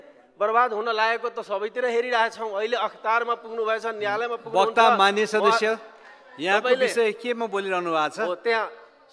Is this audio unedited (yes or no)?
yes